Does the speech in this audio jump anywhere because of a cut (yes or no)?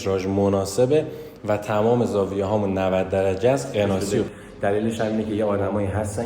yes